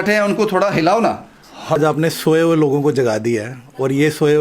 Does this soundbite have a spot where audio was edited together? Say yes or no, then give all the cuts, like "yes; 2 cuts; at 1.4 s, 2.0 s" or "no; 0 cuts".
yes; 1 cut; at 1.8 s